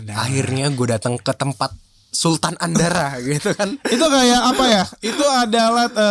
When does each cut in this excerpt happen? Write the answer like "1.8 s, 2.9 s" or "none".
none